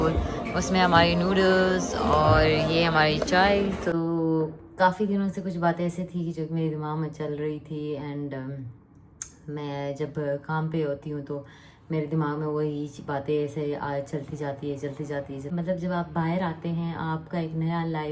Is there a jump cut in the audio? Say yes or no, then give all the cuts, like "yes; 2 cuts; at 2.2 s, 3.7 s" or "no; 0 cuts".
yes; 2 cuts; at 3.9 s, 15.5 s